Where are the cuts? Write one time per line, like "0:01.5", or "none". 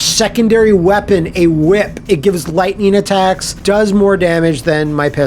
0:03.5